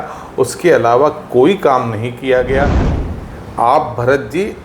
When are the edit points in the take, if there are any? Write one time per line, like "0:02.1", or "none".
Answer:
0:03.0